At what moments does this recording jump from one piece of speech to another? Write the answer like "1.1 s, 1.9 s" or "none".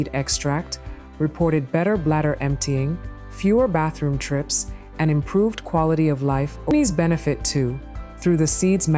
6.7 s